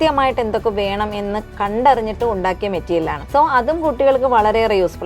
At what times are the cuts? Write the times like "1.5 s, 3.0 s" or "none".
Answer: 1.5 s, 3.2 s